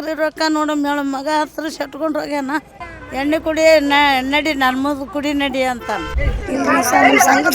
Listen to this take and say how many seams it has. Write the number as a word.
two